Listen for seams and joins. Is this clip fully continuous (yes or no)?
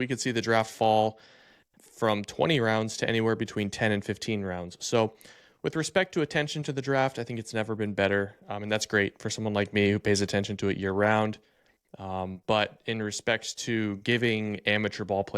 yes